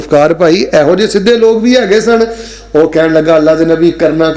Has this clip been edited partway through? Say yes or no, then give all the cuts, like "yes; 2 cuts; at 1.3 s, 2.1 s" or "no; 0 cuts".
no; 0 cuts